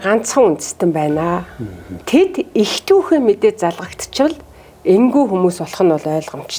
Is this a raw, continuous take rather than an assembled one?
yes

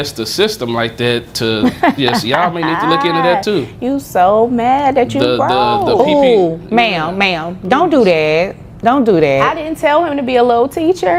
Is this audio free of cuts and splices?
yes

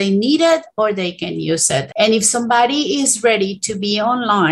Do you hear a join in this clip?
no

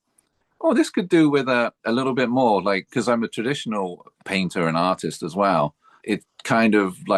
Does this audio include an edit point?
no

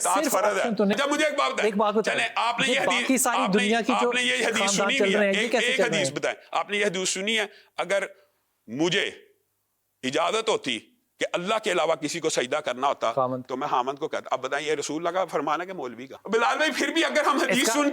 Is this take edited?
yes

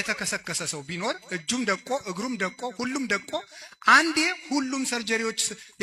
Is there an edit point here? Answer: no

